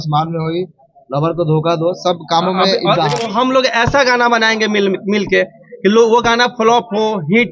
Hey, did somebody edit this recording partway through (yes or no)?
yes